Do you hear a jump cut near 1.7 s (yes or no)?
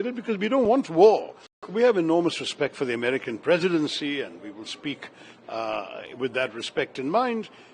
yes